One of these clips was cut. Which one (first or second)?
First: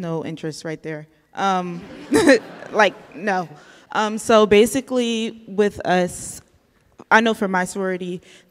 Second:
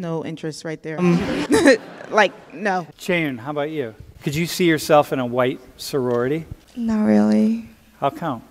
second